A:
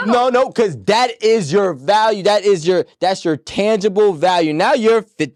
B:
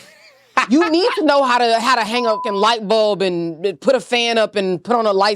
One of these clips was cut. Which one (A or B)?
B